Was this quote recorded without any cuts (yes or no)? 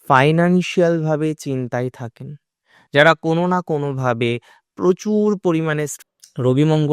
no